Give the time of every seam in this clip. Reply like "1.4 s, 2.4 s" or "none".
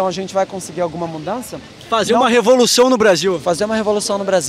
none